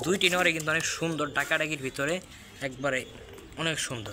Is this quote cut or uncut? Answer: uncut